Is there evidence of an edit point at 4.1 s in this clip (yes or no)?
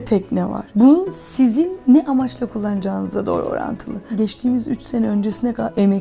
yes